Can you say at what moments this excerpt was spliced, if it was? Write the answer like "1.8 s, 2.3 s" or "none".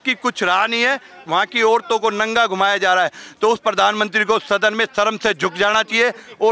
1.1 s